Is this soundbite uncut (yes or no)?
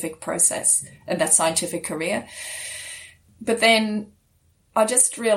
no